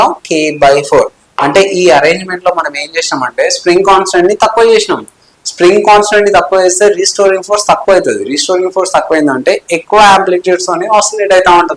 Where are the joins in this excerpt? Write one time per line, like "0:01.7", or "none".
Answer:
none

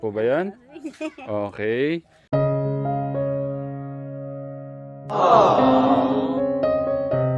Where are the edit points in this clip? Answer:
0:02.1

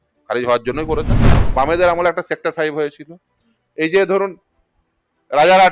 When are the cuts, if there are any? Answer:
0:01.4

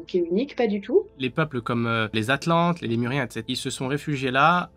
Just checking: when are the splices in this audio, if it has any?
0:01.1
0:02.1
0:03.4

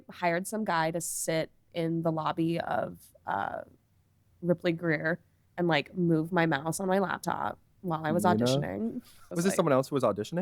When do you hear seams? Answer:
0:09.3

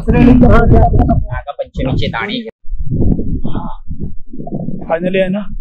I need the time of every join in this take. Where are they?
0:02.5

